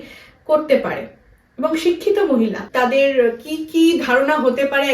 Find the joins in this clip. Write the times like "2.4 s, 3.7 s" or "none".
2.6 s